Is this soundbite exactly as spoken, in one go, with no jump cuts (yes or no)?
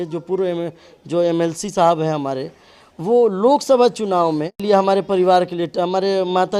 yes